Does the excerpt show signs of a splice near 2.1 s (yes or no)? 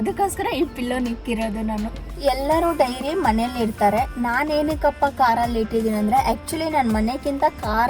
yes